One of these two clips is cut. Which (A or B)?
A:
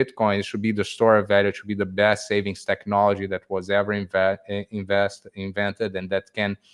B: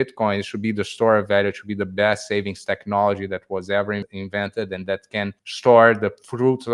B